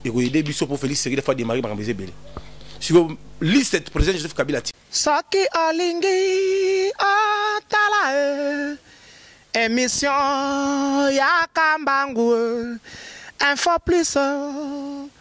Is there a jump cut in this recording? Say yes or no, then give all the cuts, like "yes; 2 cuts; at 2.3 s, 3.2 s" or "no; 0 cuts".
yes; 1 cut; at 4.7 s